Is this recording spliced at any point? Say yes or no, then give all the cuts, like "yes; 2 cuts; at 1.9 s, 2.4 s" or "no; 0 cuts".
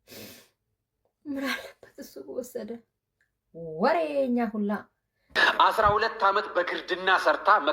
yes; 1 cut; at 5.2 s